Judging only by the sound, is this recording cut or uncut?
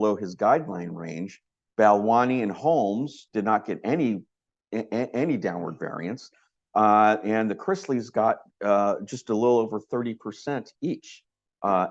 uncut